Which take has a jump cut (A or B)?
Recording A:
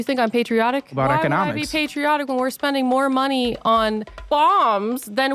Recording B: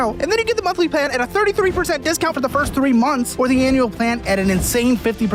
A